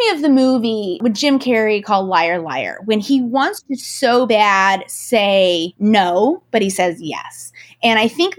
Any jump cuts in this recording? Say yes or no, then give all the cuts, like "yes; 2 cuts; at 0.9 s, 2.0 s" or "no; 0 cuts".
yes; 2 cuts; at 0.9 s, 5.7 s